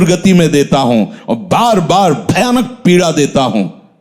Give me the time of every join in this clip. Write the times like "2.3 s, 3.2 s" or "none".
none